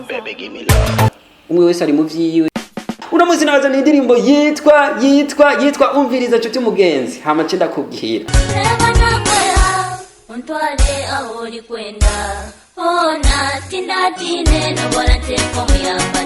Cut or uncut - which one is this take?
cut